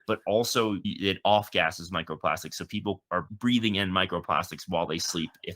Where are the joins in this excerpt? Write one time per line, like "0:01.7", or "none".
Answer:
0:03.3